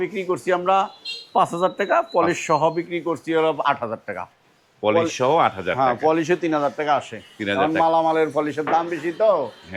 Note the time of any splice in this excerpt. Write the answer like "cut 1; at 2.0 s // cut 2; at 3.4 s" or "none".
none